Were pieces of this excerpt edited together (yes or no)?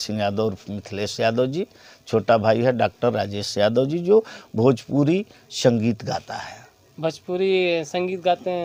no